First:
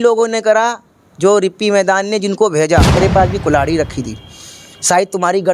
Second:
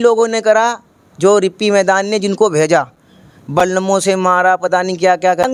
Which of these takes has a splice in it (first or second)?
first